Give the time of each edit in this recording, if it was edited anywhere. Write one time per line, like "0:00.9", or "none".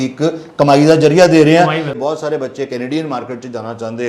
0:01.9